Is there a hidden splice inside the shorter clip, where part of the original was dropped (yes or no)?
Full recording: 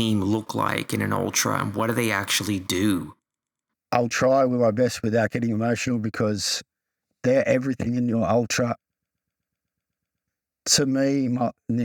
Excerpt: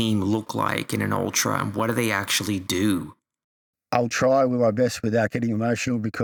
no